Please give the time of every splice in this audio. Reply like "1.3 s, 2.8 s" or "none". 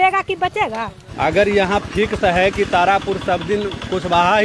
1.0 s